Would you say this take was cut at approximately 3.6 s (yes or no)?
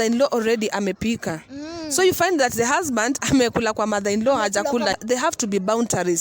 no